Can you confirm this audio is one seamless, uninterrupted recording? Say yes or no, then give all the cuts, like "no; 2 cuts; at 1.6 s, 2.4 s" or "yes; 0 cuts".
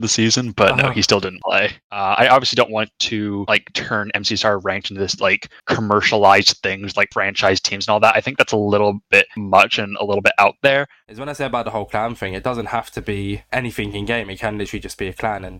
no; 2 cuts; at 1.9 s, 10.9 s